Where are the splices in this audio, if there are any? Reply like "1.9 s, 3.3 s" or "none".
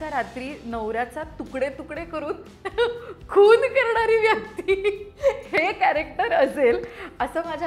none